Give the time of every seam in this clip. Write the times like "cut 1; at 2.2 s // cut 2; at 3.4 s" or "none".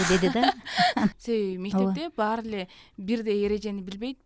cut 1; at 1.1 s